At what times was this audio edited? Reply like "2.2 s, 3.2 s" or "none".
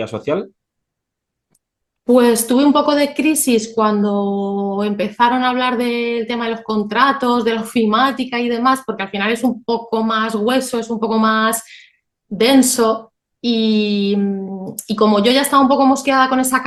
none

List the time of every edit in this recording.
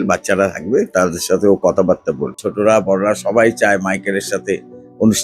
2.4 s

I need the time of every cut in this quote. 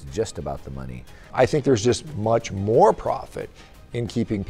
1.3 s

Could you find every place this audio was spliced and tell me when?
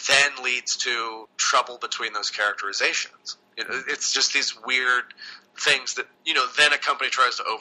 1.3 s, 6.2 s

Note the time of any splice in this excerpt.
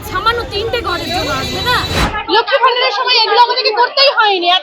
2.1 s

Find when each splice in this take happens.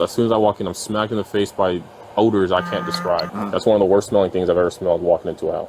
3.3 s

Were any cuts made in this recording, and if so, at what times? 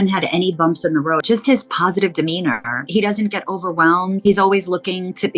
1.2 s, 2.9 s, 4.2 s

